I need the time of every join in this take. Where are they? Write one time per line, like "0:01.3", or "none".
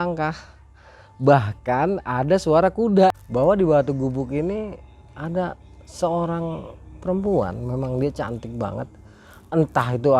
0:03.2